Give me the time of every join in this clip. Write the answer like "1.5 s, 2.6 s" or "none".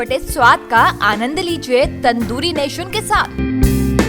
none